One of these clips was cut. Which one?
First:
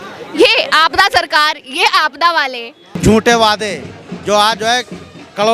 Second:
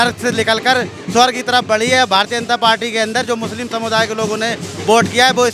first; 1 cut; at 2.8 s

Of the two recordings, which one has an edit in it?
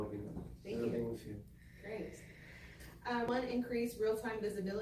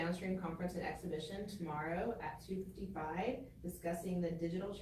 first; 1 cut; at 3.3 s

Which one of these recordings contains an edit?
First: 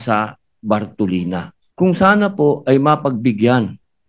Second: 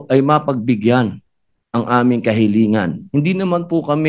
first; 1 cut; at 1.6 s

